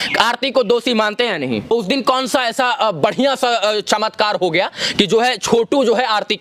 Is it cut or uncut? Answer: cut